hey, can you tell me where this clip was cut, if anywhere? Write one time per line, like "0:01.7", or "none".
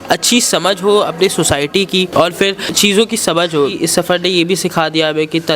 0:03.8